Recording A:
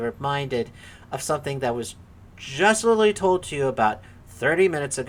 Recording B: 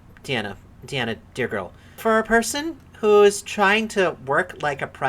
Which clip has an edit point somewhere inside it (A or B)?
B